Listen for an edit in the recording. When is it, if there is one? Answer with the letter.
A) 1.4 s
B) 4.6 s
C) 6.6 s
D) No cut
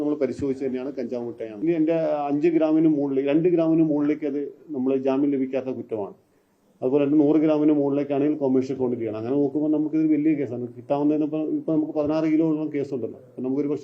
A